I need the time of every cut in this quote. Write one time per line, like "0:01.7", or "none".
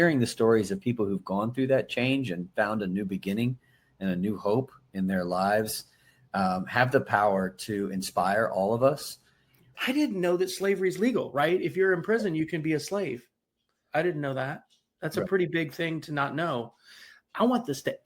0:09.7
0:17.3